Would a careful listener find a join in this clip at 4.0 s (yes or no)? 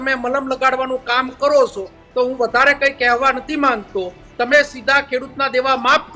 no